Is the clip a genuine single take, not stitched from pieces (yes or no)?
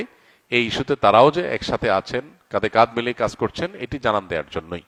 yes